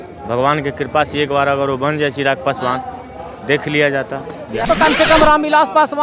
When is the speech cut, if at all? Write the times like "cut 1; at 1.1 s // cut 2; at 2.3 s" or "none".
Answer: cut 1; at 4.7 s